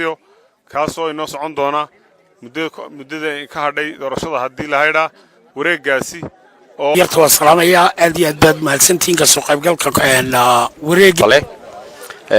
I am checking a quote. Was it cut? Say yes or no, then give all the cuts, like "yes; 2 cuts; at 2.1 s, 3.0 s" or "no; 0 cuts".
yes; 2 cuts; at 6.9 s, 11.2 s